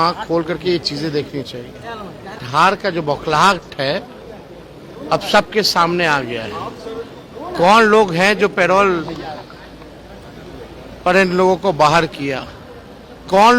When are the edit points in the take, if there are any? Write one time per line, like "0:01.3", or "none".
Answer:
0:02.4